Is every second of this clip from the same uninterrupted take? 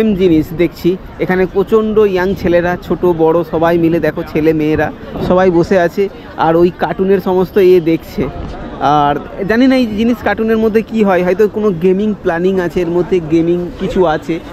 yes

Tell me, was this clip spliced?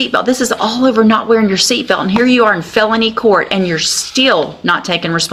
no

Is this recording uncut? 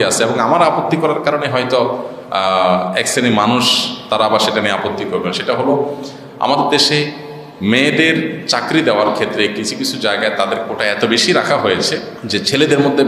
no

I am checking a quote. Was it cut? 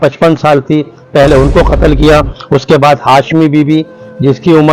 no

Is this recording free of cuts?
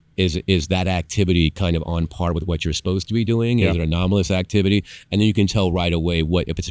yes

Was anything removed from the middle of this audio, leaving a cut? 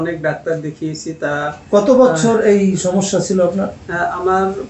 no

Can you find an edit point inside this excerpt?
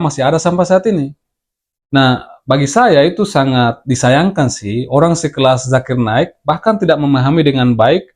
yes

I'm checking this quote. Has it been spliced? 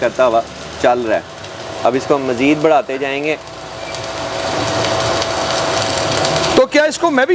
no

